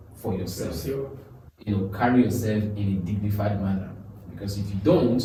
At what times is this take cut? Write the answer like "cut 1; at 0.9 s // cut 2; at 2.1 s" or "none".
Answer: none